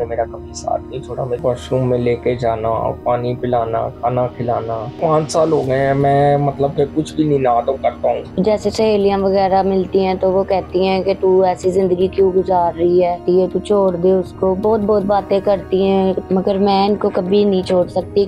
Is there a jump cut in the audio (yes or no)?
yes